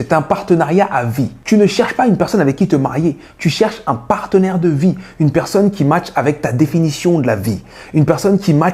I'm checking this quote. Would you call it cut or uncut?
cut